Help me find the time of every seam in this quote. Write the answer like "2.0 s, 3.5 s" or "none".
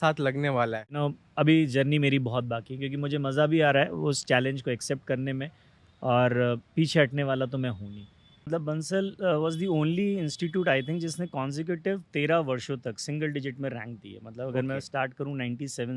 1.0 s, 8.5 s